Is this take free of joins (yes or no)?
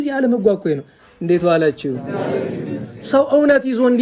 yes